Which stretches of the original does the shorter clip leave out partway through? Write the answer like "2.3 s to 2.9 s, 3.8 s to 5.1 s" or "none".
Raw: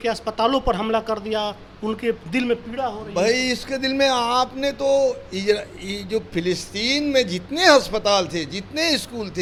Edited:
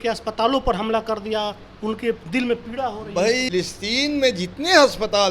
3.5 s to 6.4 s